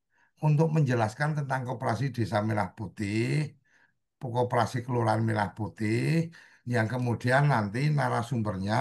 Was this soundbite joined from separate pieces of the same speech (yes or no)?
no